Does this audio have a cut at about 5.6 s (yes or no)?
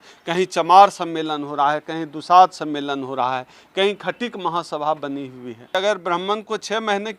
yes